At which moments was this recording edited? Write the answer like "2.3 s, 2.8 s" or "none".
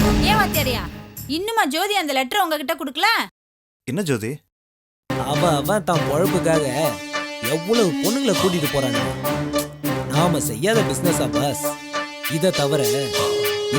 5.0 s

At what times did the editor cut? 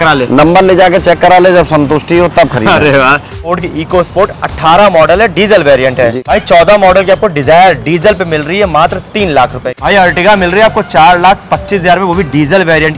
3.4 s, 6.1 s, 9.7 s

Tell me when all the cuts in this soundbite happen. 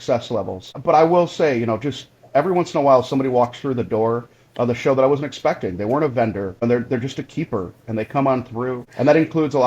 0.8 s, 6.6 s, 8.8 s

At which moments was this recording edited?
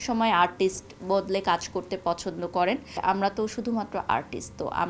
3.0 s

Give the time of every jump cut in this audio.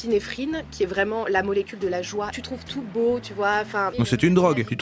2.4 s, 3.9 s

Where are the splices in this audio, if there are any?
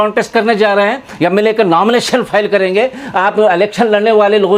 none

